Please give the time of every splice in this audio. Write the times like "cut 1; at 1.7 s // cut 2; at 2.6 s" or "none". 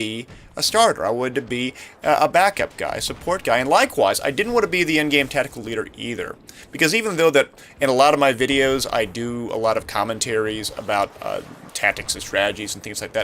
cut 1; at 11.0 s